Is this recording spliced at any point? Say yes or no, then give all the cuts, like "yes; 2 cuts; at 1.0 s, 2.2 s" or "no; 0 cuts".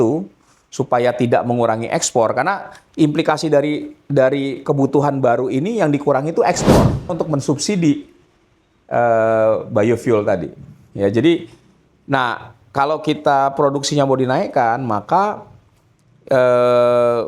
yes; 1 cut; at 7.1 s